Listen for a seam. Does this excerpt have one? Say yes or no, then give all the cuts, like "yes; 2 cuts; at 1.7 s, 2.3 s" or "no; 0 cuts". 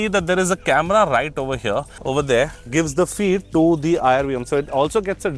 yes; 1 cut; at 2.0 s